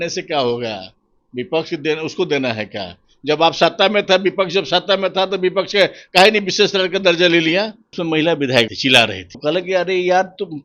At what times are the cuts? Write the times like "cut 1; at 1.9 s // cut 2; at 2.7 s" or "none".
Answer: cut 1; at 8.0 s // cut 2; at 8.7 s